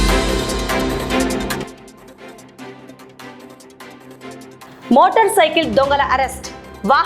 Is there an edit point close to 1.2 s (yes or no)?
yes